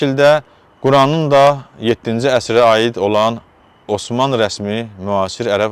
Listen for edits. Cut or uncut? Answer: uncut